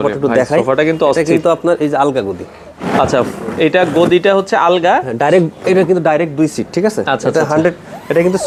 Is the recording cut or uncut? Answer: uncut